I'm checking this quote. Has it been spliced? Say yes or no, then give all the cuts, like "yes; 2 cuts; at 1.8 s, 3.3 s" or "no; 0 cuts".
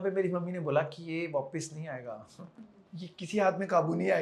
no; 0 cuts